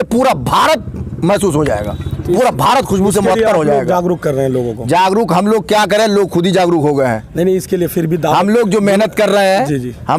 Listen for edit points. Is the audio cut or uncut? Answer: uncut